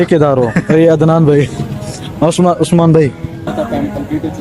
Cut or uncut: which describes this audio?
cut